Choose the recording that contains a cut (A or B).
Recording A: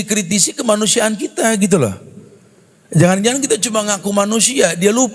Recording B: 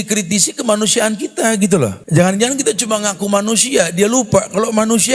B